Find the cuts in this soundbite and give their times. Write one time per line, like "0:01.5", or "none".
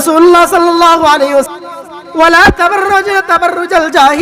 0:01.5

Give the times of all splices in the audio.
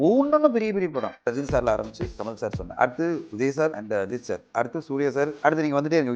0:01.3
0:02.6
0:03.8
0:05.3

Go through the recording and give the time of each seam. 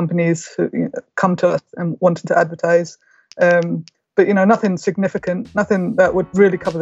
none

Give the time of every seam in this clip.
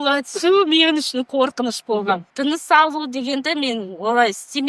0:02.3

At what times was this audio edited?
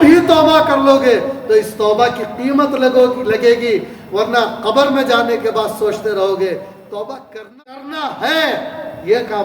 0:07.2

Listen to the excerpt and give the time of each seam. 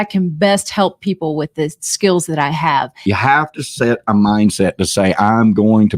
0:03.0

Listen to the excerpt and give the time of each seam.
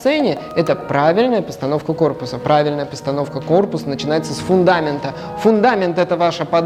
none

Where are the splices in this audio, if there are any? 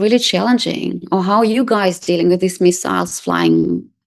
none

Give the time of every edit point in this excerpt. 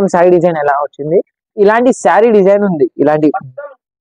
none

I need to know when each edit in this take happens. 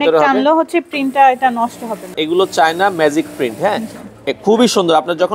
0:02.1

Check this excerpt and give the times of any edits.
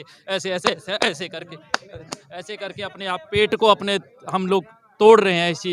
none

